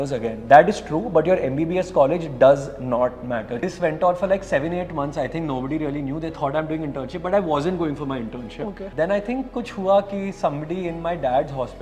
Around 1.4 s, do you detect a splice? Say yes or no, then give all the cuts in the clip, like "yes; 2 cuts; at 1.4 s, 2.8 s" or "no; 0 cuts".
no; 2 cuts; at 3.6 s, 8.8 s